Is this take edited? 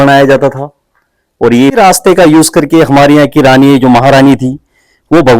yes; 1 cut; at 1.8 s

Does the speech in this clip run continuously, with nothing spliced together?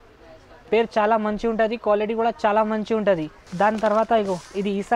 no; 1 cut; at 3.4 s

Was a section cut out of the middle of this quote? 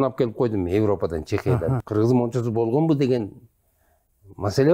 yes; 1 cut; at 1.8 s

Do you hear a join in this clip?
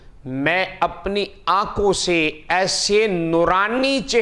no; 0 cuts

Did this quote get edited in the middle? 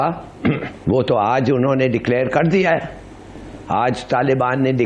no; 0 cuts

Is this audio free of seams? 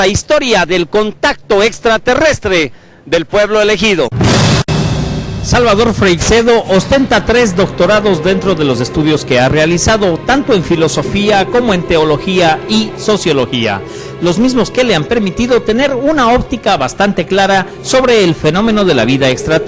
no; 1 cut; at 10.2 s

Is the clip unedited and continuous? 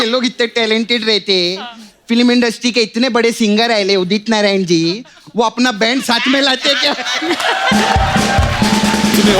yes; 0 cuts

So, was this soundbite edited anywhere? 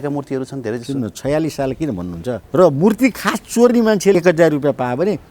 yes; 2 cuts; at 2.4 s, 4.1 s

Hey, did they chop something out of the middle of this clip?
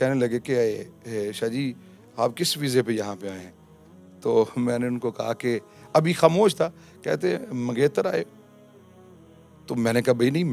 no; 0 cuts

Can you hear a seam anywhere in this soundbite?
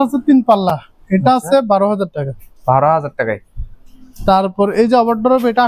no; 0 cuts

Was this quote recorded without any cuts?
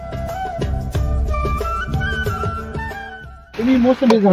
no; 1 cut; at 2.9 s

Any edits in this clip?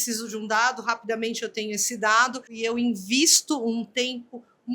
yes; 1 cut; at 2.5 s

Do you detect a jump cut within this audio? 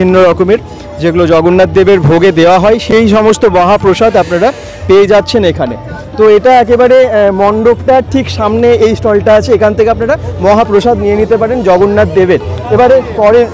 no; 0 cuts

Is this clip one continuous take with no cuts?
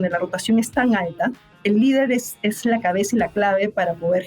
no; 1 cut; at 1.5 s

